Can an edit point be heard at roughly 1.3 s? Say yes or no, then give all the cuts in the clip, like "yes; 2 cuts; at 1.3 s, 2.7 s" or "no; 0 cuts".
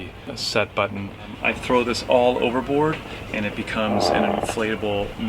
yes; 1 cut; at 1.3 s